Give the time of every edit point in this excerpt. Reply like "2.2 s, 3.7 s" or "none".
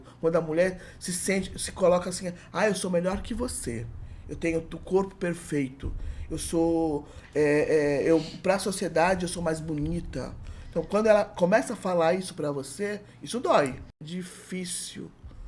14.1 s